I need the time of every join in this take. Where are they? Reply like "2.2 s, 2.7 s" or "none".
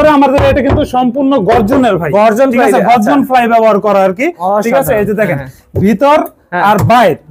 none